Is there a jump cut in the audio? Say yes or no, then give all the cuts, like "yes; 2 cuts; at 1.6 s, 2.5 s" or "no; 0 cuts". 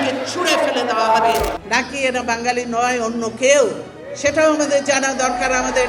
yes; 1 cut; at 1.6 s